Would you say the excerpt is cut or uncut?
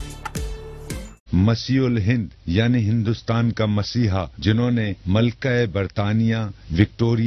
cut